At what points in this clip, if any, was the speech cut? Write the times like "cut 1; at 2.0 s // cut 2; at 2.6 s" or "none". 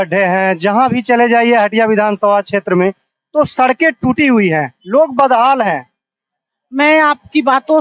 none